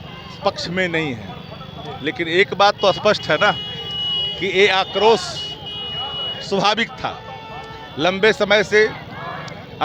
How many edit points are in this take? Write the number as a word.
zero